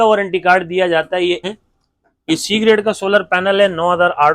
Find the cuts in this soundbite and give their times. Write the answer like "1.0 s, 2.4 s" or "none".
1.4 s

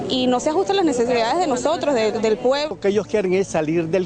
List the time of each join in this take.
3.1 s

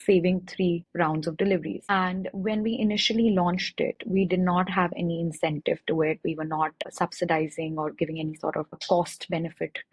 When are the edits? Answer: 0.9 s, 1.8 s, 6.9 s, 8.8 s

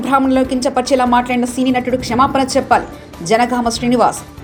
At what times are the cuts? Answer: none

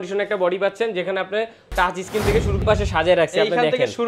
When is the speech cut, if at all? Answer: 2.6 s

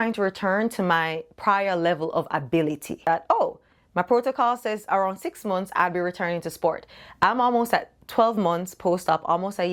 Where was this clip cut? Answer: 3.1 s

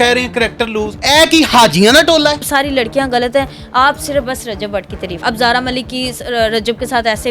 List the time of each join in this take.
0.9 s, 2.5 s, 5.2 s

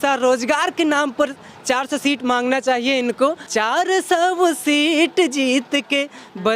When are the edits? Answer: 3.3 s

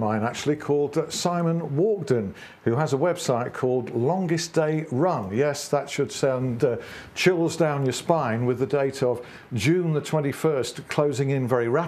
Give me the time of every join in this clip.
none

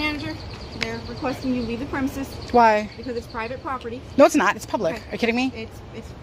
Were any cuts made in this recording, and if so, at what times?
none

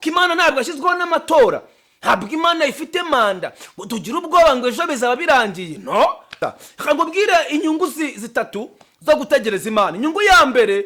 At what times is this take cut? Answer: 6.4 s

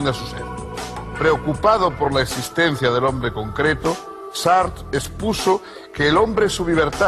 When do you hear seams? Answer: none

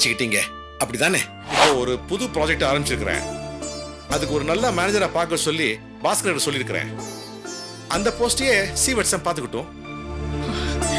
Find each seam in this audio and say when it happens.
1.4 s

